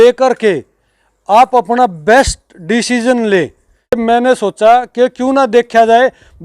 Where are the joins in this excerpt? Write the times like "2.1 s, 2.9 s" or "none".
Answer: 4.0 s